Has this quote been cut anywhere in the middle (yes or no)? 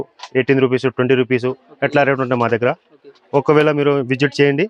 no